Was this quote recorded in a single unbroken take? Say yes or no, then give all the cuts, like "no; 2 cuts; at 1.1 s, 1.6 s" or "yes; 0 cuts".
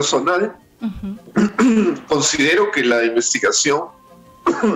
yes; 0 cuts